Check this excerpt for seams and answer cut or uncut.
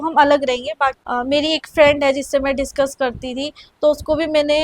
cut